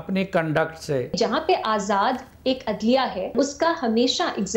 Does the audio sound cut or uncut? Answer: cut